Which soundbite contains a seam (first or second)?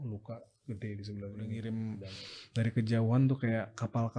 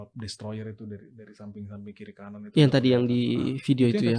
first